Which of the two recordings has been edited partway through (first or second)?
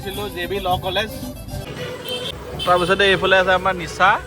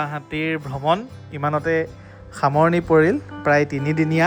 first